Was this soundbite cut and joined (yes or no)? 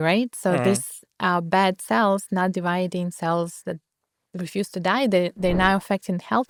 no